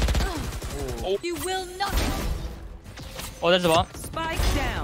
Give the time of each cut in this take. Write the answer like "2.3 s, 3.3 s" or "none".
1.2 s